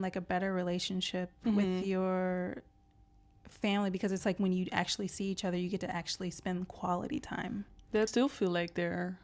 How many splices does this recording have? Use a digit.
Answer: 1